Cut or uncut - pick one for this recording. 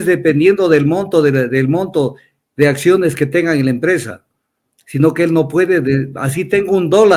uncut